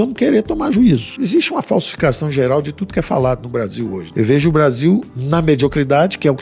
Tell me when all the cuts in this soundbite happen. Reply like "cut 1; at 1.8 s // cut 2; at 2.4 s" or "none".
cut 1; at 1.1 s // cut 2; at 4.0 s